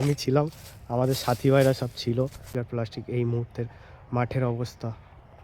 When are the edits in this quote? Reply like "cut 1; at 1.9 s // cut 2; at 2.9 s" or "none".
cut 1; at 2.5 s